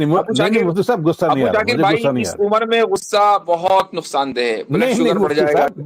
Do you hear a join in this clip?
no; 0 cuts

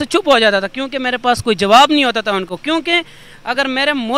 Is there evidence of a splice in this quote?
no; 0 cuts

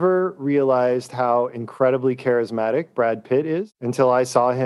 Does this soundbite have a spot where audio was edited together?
no; 0 cuts

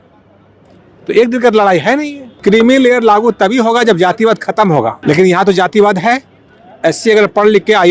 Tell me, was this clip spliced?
yes; 2 cuts; at 2.2 s, 5.0 s

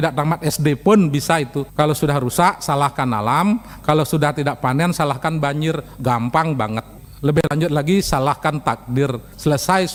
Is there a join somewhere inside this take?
no; 0 cuts

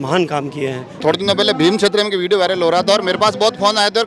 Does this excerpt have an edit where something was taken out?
yes; 1 cut; at 1.0 s

